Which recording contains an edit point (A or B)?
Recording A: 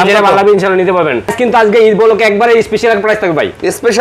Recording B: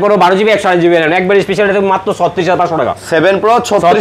A